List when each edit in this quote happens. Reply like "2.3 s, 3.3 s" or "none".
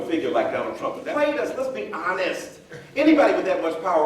1.0 s